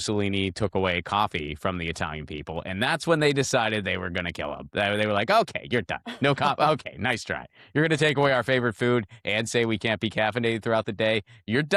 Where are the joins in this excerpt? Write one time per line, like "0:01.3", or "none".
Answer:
none